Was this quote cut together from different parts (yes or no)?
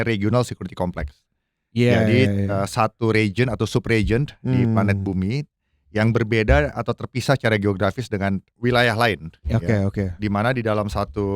no